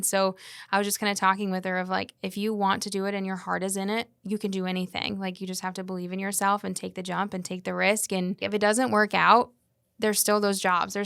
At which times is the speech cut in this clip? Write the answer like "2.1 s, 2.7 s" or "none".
8.4 s